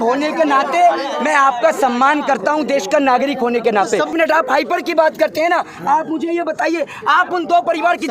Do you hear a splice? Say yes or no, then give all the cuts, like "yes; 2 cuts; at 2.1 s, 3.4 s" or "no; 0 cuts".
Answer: yes; 1 cut; at 4.1 s